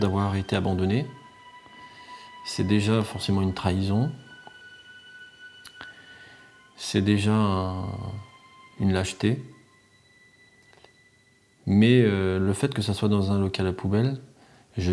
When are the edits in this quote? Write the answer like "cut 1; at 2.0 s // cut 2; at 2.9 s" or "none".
cut 1; at 1.3 s // cut 2; at 2.6 s